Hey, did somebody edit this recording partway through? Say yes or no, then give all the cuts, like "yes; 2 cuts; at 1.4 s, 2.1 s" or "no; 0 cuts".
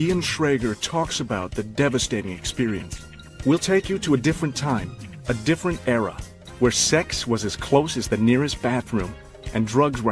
yes; 1 cut; at 8.9 s